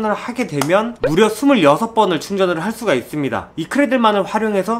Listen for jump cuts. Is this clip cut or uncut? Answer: cut